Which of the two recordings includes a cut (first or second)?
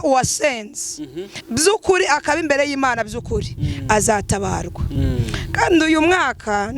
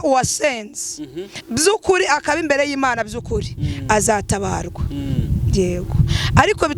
first